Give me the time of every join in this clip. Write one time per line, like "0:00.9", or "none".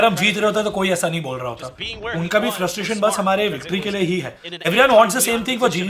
none